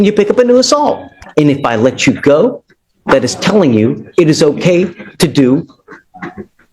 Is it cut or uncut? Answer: cut